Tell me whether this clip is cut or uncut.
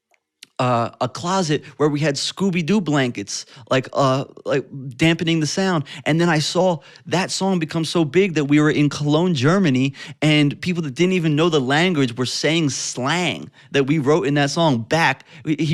uncut